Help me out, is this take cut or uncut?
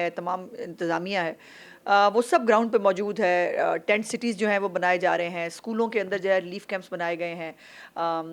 uncut